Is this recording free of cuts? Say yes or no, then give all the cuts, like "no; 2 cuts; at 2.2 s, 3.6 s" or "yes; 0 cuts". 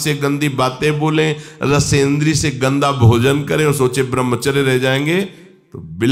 yes; 0 cuts